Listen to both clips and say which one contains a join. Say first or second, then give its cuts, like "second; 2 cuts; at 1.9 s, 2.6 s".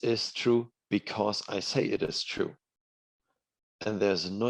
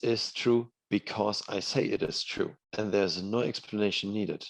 second; 1 cut; at 2.6 s